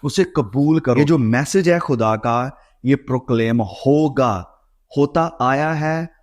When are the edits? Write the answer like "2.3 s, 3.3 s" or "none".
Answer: 1.0 s

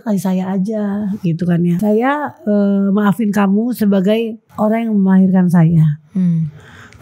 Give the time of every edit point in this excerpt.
1.8 s, 4.4 s

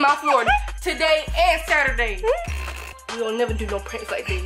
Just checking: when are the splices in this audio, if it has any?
3.0 s

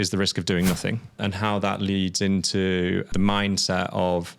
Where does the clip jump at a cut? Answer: 1.2 s, 3.1 s

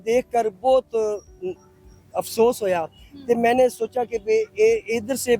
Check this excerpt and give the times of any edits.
none

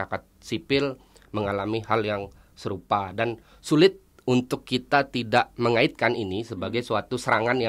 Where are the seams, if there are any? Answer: none

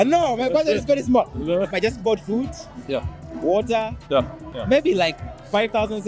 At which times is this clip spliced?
1.7 s, 4.5 s

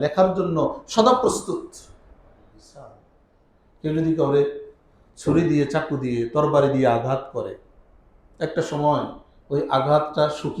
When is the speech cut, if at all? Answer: 3.1 s

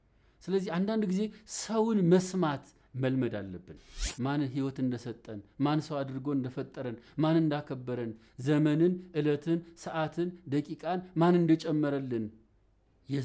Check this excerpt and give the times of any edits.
4.0 s

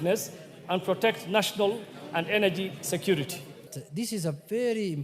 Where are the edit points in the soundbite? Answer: 3.8 s

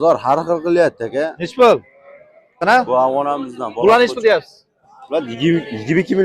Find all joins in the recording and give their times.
2.6 s

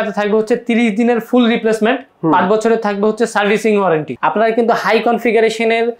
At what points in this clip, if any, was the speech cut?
4.1 s

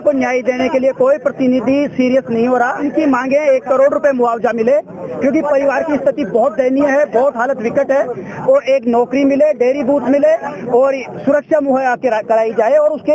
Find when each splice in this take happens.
2.9 s

